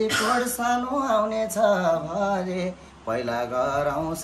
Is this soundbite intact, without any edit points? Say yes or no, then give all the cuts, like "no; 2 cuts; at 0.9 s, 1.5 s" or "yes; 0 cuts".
yes; 0 cuts